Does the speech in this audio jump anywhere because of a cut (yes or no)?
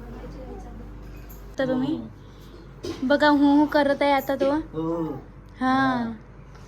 yes